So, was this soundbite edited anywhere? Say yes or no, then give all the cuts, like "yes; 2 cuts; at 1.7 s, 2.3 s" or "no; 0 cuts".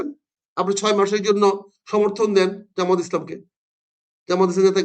no; 0 cuts